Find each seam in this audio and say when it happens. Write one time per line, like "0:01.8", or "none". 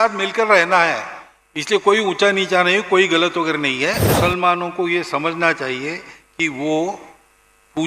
0:04.1